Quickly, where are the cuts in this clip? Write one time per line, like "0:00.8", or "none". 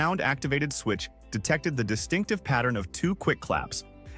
none